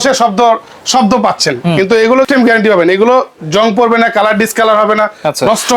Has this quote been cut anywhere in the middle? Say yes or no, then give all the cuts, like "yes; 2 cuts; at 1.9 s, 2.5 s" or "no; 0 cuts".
yes; 1 cut; at 2.3 s